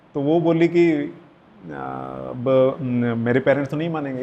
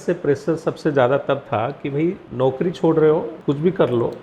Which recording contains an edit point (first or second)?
second